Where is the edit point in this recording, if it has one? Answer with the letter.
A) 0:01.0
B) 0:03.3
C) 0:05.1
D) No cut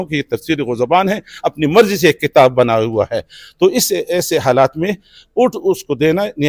D